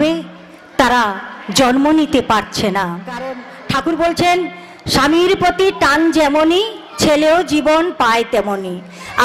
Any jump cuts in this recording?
yes; 1 cut; at 3.5 s

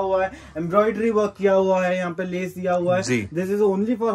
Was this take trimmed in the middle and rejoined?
no; 0 cuts

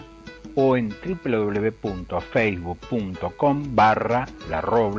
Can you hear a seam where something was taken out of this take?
no; 0 cuts

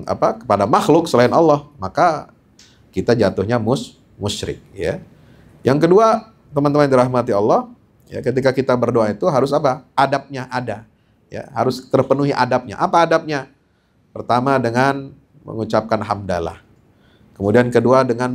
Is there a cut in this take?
no; 0 cuts

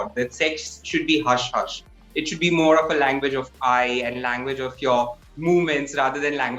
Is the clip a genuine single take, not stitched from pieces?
yes; 0 cuts

